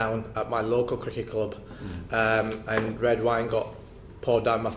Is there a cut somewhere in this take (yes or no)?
no